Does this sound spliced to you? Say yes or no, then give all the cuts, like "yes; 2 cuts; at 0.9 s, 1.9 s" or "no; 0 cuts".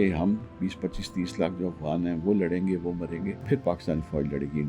yes; 1 cut; at 3.4 s